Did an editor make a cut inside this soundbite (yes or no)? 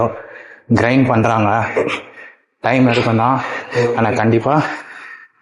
no